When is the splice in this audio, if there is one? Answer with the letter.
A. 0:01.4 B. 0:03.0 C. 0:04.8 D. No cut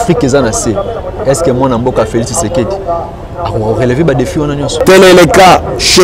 C